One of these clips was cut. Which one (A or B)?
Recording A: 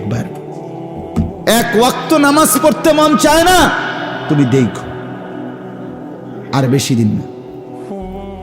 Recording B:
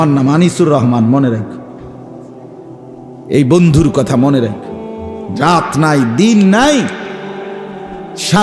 A